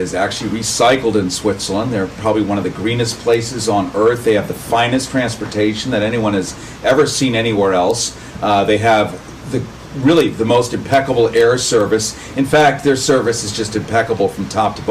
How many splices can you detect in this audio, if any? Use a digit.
1